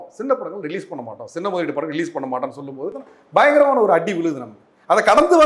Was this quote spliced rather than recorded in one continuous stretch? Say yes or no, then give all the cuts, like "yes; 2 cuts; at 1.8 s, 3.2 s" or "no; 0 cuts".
yes; 1 cut; at 3.0 s